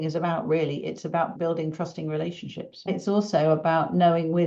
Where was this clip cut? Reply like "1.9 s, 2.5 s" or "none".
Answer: 1.4 s, 2.9 s